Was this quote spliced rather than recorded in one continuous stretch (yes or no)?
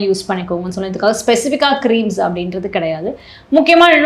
no